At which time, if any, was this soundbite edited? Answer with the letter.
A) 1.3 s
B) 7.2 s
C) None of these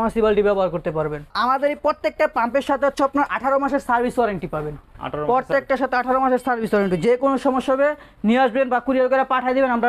A